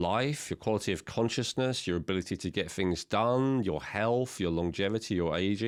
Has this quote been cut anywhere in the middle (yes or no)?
no